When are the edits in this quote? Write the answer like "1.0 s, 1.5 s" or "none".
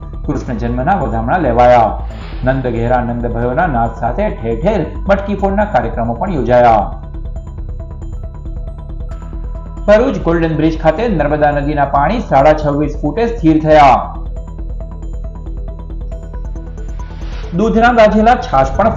none